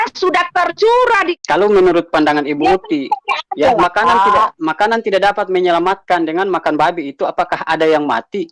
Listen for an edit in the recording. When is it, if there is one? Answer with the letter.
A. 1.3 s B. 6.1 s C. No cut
A